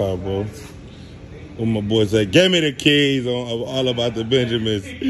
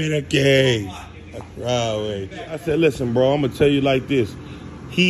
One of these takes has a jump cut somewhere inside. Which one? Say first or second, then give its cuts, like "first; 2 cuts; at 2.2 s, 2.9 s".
second; 1 cut; at 2.6 s